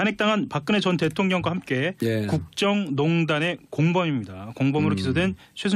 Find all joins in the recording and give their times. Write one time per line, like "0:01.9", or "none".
none